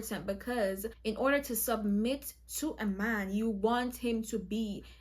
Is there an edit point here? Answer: yes; 1 cut; at 0.9 s

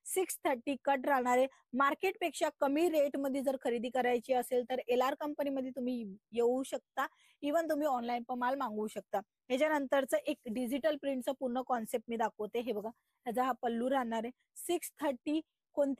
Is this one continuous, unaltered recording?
yes; 0 cuts

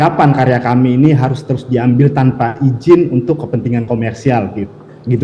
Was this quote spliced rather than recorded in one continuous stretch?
no; 0 cuts

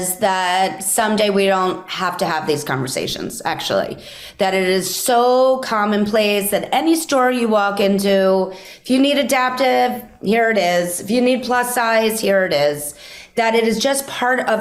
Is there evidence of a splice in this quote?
no; 0 cuts

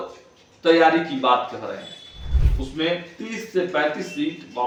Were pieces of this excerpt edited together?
no; 0 cuts

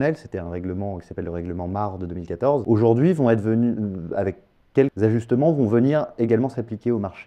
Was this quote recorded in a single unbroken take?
no; 2 cuts; at 2.6 s, 4.9 s

